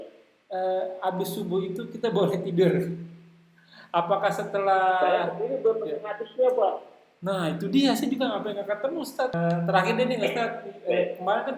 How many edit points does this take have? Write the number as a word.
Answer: one